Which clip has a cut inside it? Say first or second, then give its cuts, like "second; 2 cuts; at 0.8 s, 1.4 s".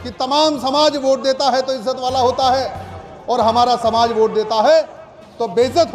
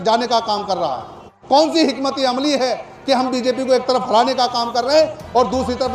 second; 1 cut; at 1.3 s